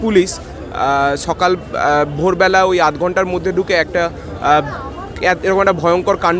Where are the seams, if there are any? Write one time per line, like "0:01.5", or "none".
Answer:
none